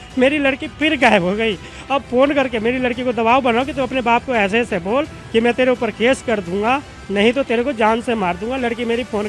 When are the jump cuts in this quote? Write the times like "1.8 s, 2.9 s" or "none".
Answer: none